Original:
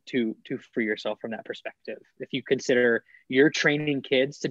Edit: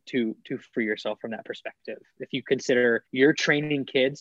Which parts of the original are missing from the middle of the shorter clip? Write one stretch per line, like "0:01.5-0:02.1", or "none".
0:03.1-0:03.2